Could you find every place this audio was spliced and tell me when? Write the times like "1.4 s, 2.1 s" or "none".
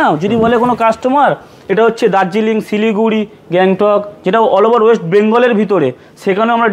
none